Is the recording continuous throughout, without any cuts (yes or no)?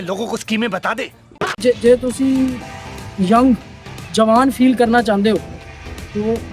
no